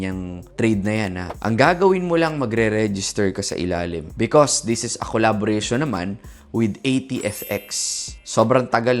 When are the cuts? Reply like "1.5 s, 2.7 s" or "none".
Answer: 1.3 s, 4.1 s